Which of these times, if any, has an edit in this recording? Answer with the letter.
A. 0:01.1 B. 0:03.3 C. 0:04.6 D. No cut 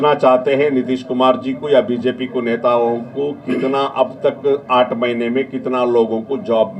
D